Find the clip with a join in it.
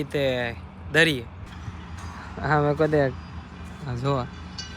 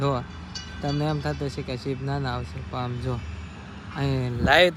first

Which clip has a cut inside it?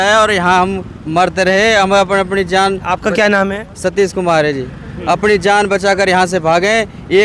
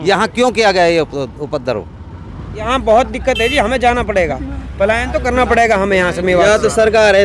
second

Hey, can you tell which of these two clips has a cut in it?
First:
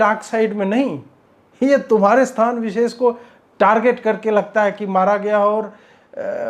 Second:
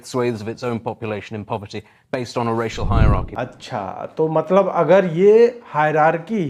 second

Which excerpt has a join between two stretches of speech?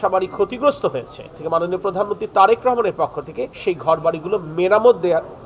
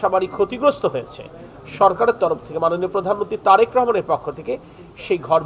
first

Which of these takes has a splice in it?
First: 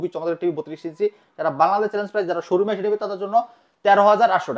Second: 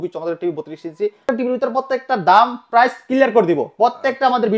second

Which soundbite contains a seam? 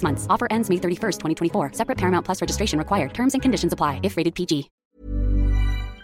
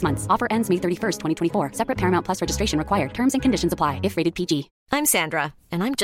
first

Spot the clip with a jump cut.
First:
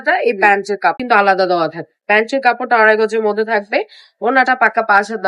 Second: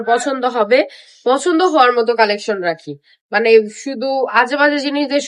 first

